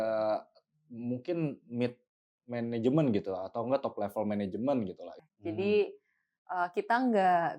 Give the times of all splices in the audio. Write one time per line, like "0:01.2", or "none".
0:05.1